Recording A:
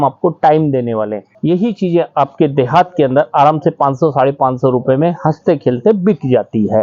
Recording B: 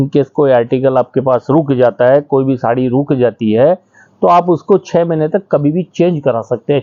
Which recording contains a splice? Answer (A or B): A